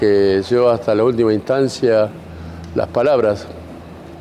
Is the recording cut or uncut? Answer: uncut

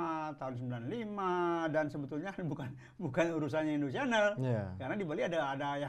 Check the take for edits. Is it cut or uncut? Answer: uncut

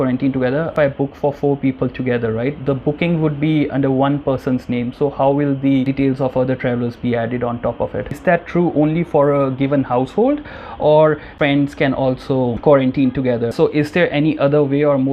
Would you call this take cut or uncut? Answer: cut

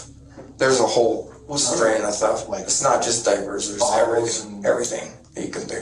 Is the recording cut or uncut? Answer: uncut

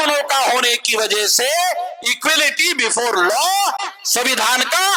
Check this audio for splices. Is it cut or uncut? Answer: uncut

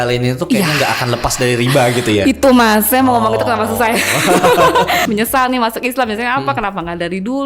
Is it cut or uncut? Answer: cut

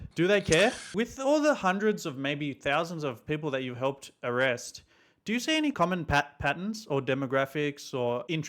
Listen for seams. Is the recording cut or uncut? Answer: cut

